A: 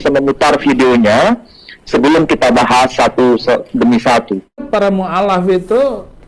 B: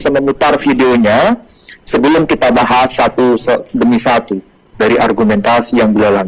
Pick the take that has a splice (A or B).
A